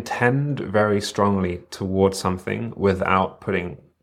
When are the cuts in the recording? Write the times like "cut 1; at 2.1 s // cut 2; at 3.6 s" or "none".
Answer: none